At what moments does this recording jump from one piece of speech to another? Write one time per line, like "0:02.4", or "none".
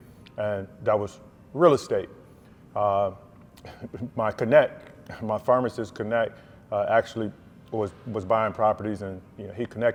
none

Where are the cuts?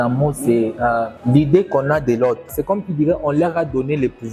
0:02.5

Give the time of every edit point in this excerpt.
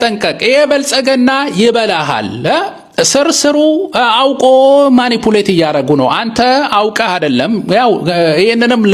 none

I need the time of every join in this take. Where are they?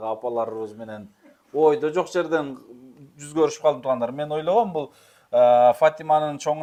none

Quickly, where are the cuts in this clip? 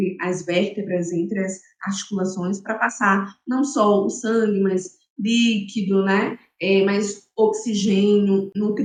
none

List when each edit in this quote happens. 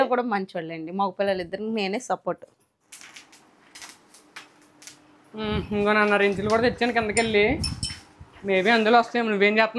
0:02.9

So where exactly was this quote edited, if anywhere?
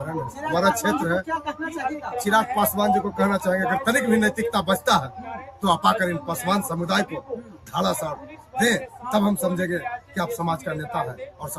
none

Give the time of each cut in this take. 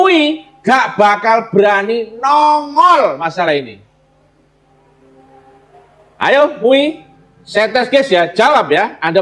none

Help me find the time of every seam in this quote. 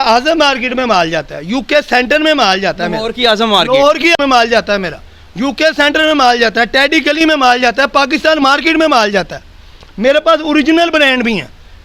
none

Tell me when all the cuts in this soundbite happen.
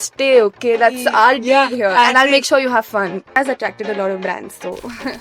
0:03.4

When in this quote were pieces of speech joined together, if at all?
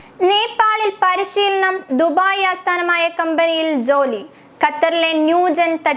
none

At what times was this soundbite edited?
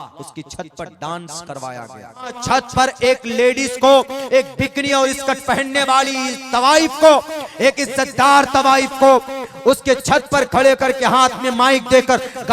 0:02.4

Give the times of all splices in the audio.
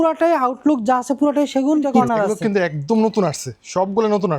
0:02.0

